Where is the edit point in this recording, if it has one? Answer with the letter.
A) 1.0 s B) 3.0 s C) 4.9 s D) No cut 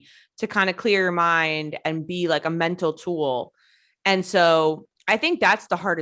C